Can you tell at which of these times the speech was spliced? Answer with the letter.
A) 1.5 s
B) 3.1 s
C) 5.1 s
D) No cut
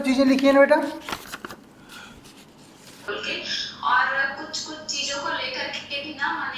B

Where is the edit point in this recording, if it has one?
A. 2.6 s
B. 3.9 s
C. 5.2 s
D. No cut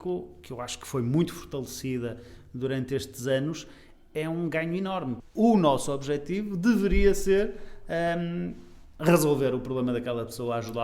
C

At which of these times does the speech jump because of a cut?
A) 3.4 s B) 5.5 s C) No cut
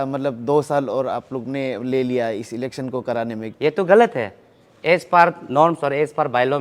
A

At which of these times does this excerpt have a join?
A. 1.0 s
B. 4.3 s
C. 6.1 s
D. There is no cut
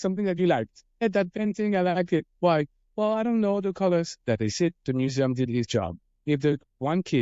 A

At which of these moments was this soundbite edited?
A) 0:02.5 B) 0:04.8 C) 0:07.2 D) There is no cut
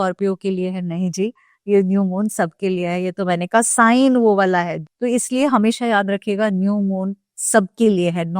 B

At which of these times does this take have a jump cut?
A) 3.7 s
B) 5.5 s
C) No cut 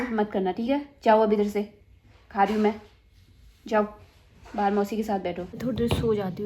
B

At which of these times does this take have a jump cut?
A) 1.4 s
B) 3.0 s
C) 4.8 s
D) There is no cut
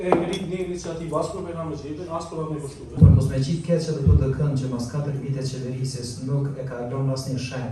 B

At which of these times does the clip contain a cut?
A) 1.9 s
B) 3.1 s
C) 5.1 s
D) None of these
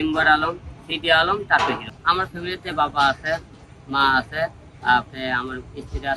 A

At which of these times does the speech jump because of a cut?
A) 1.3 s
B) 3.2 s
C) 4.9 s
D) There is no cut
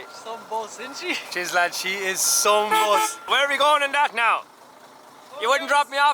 B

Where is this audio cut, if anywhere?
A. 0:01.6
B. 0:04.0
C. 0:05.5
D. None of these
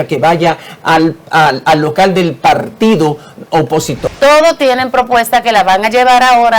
B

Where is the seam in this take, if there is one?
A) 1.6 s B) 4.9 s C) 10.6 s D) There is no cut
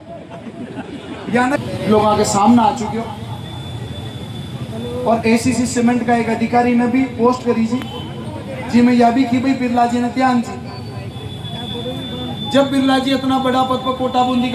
A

